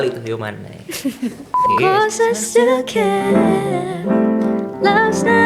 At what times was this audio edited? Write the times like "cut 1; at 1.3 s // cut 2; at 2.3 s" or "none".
cut 1; at 1.5 s